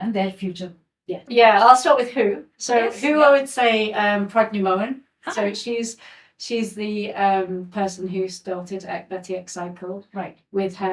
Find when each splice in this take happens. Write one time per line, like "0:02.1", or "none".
0:01.3